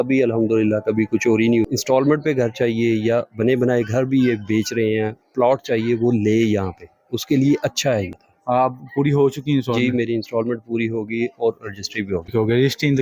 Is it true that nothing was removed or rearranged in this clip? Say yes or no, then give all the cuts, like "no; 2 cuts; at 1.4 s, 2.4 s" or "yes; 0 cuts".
no; 3 cuts; at 1.7 s, 8.2 s, 12.3 s